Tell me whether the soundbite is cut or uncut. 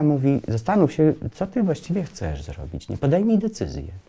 uncut